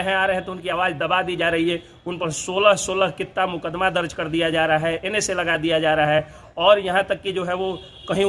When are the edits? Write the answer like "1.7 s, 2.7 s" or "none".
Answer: none